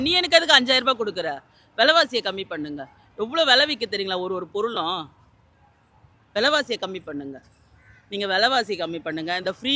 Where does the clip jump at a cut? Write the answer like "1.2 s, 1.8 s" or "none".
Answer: none